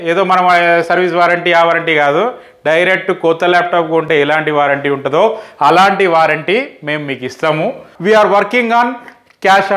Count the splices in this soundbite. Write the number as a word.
one